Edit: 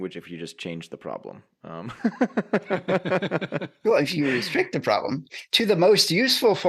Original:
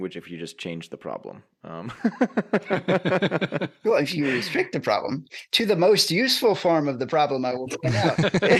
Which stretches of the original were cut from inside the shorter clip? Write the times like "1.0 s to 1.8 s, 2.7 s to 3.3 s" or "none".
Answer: none

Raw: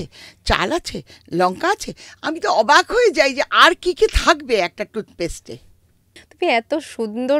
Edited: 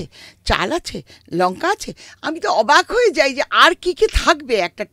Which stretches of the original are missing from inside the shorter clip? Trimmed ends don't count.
none

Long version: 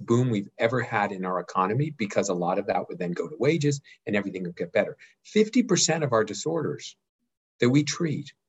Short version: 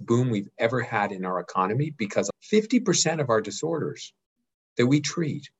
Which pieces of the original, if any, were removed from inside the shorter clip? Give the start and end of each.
2.3 s to 5.1 s

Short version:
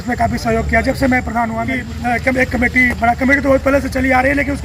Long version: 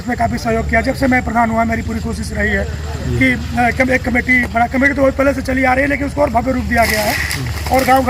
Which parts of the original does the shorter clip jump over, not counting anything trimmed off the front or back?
1.8 s to 3.4 s

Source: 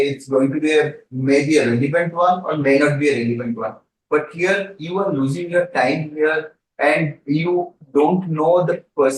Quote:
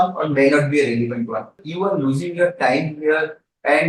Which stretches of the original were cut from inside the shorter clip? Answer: 3.9 s to 4.8 s

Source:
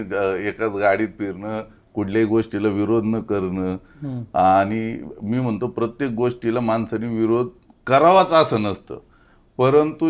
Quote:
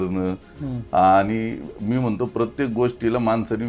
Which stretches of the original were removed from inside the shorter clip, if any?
none

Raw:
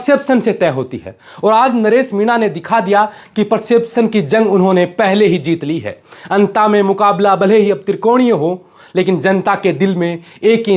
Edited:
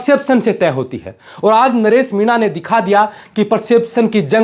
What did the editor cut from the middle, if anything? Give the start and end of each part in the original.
none

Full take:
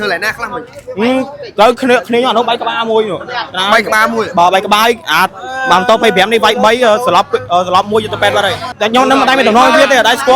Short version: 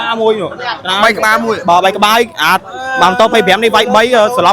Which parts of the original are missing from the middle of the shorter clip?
none

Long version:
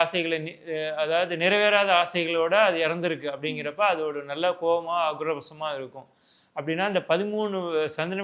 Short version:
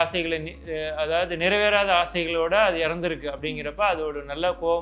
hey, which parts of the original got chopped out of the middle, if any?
none

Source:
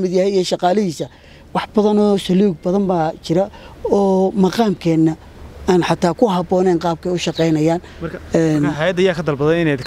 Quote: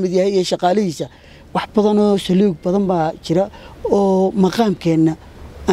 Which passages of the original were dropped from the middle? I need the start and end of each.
none

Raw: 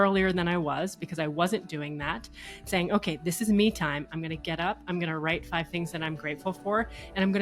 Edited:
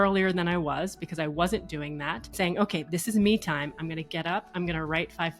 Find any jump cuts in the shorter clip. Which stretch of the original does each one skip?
2.2 s to 2.5 s

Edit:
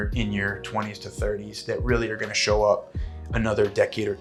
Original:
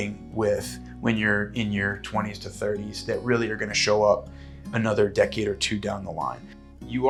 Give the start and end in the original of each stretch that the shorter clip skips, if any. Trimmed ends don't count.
none

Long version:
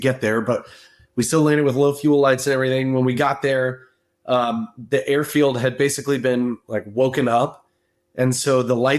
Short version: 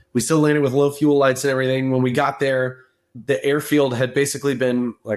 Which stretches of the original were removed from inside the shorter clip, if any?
4.1 s to 4.7 s

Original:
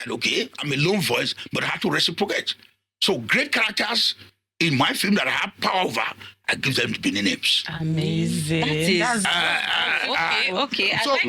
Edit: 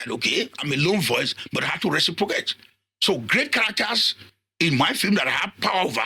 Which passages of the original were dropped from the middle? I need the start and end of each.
none

